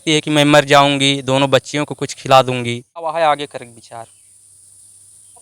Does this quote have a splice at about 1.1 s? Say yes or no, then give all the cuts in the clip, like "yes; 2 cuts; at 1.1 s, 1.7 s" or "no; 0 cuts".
no; 1 cut; at 3.1 s